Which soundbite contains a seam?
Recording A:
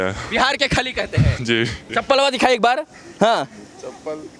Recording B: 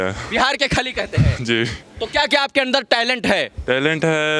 A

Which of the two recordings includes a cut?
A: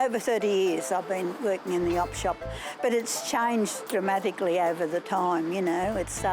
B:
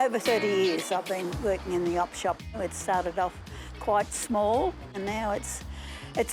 B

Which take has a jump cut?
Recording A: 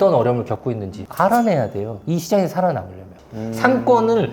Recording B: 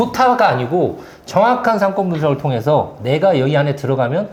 A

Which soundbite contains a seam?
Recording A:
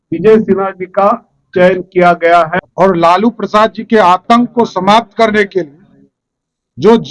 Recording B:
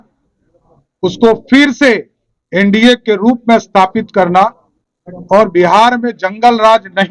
A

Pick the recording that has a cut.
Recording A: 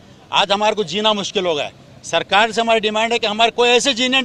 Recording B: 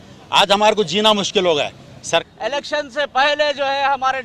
B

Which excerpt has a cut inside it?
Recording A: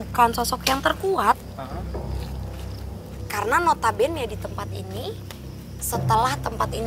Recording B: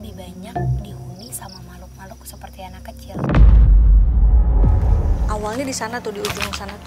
B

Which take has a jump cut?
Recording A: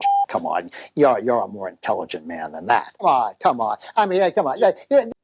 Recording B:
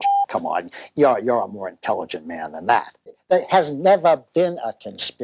B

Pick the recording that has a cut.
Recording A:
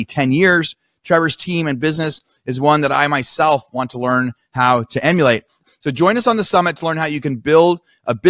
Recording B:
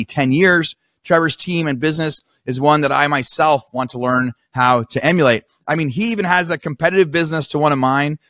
A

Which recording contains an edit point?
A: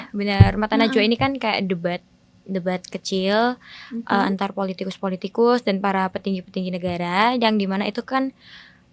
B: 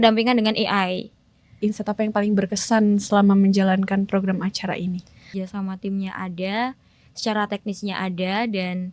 B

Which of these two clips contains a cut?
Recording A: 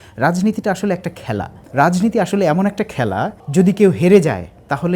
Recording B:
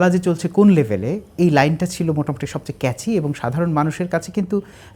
A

